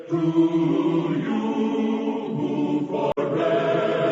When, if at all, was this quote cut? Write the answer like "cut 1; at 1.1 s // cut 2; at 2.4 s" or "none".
cut 1; at 3.1 s